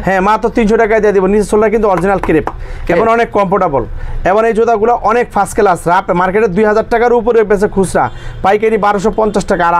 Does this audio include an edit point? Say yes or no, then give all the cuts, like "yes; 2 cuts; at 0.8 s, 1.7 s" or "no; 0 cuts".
no; 0 cuts